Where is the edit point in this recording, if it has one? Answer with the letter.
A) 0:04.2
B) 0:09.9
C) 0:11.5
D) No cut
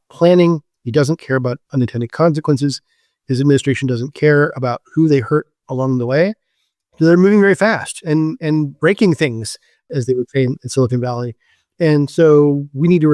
B